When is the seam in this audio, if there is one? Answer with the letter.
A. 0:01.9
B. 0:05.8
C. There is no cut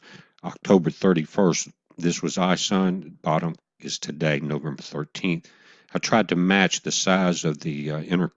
A